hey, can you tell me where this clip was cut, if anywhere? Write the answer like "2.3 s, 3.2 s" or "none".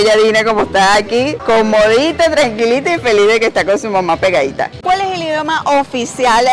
1.4 s, 4.8 s